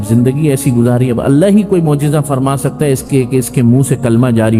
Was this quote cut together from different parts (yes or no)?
no